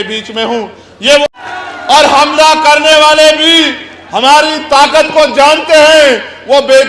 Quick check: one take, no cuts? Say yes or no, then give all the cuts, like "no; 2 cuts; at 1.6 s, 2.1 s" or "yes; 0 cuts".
no; 1 cut; at 1.2 s